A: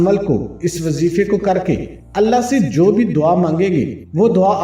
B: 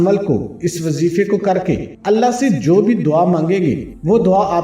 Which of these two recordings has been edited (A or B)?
B